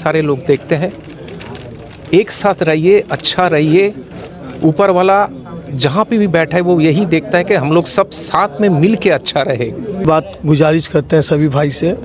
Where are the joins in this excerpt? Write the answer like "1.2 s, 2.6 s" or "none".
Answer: 10.0 s